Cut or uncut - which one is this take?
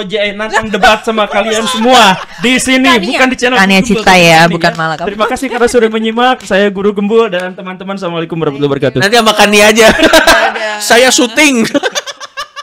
uncut